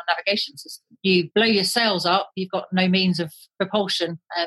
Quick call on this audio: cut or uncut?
cut